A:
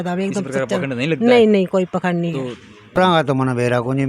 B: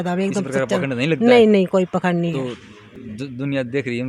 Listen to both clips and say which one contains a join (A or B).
A